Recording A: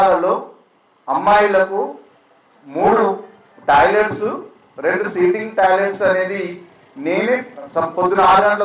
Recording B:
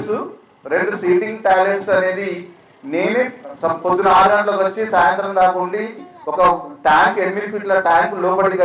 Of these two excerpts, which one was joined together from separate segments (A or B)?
B